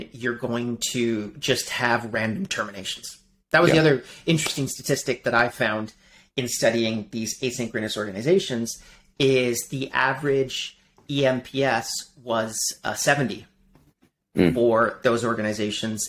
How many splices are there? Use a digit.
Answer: 0